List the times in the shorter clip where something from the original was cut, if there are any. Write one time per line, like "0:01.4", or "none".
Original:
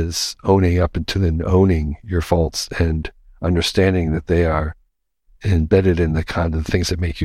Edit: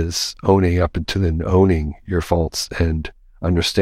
none